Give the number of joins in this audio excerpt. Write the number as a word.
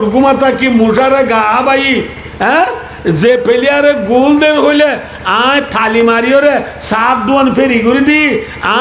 zero